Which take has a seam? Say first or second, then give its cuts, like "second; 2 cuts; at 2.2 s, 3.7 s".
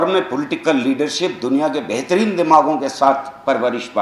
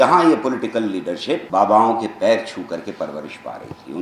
second; 1 cut; at 1.4 s